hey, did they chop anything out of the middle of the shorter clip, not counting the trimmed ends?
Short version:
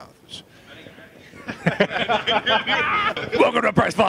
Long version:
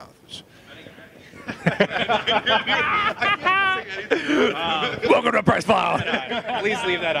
yes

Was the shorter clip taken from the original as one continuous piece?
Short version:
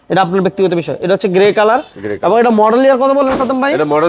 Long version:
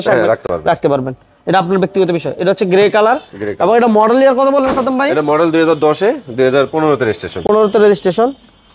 yes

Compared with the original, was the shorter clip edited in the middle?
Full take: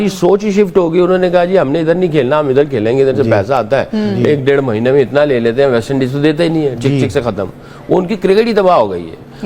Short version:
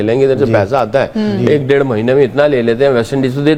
no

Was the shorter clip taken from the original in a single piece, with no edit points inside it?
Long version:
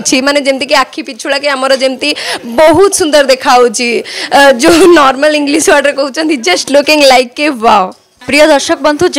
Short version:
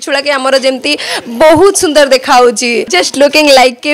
no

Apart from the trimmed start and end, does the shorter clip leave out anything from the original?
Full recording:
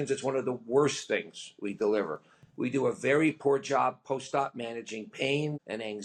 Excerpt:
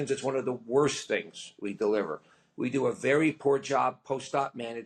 no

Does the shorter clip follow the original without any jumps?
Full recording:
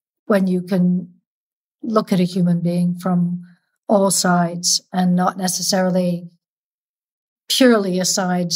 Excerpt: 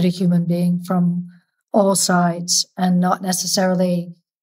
yes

